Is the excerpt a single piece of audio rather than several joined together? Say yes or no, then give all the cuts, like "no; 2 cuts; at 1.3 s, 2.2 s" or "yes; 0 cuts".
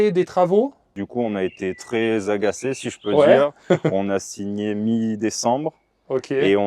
no; 1 cut; at 1.0 s